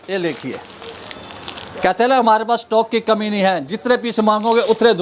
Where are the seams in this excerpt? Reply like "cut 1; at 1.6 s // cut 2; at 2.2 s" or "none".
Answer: none